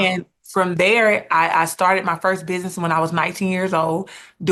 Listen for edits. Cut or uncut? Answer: uncut